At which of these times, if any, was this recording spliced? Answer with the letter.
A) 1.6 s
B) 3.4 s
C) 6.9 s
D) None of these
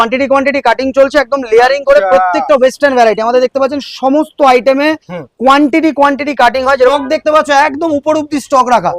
C